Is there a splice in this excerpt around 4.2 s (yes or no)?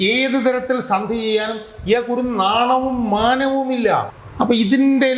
yes